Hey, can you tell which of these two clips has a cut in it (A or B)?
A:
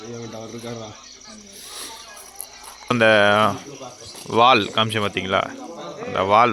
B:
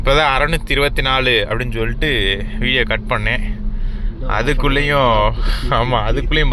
A